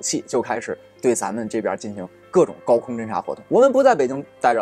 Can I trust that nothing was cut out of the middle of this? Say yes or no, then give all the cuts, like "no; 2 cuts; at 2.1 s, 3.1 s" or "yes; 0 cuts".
no; 1 cut; at 3.4 s